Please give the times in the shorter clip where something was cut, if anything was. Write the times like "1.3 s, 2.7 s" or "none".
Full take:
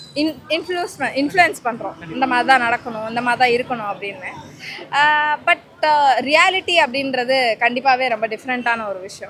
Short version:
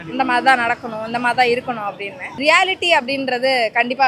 2.4 s